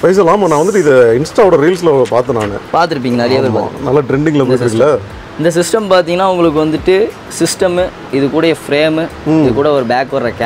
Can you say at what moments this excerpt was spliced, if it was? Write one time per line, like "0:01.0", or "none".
none